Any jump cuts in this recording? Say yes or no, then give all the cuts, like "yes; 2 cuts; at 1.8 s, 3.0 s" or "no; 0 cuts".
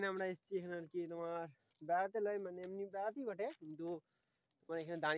no; 0 cuts